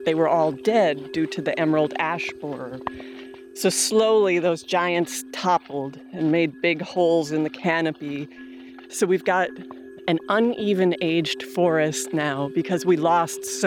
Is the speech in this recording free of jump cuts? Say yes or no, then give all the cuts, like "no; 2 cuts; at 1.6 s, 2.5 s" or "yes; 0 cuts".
no; 2 cuts; at 8.8 s, 10.0 s